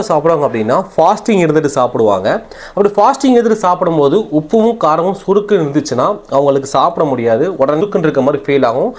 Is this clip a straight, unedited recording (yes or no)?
no